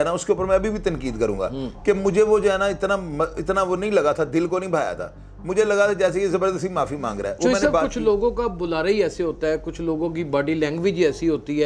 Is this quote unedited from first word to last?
yes; 0 cuts

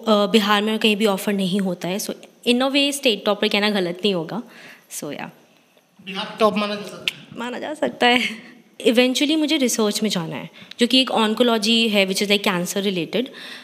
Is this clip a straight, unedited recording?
no; 1 cut; at 8.8 s

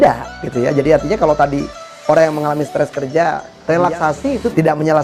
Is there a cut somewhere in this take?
yes; 1 cut; at 3.5 s

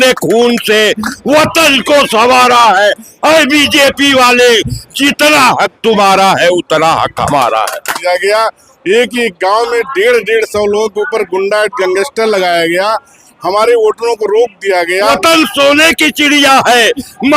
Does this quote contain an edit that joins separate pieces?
yes; 2 cuts; at 7.9 s, 15.1 s

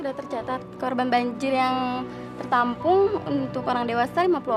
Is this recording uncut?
yes; 0 cuts

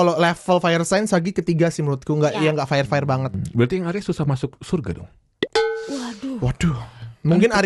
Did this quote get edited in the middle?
no; 0 cuts

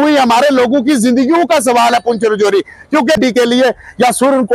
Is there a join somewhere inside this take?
yes; 1 cut; at 3.2 s

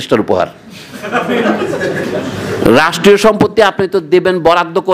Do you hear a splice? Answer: no; 0 cuts

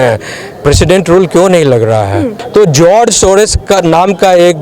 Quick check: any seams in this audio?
yes; 1 cut; at 2.4 s

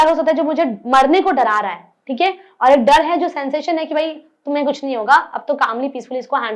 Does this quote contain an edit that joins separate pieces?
no; 0 cuts

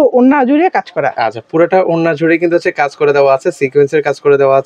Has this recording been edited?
no; 0 cuts

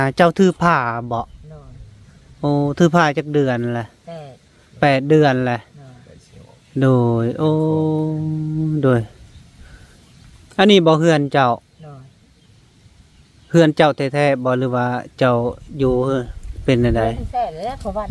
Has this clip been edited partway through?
no; 0 cuts

